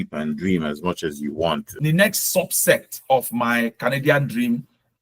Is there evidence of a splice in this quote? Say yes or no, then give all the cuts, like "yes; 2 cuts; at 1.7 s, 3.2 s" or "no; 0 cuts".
yes; 1 cut; at 1.8 s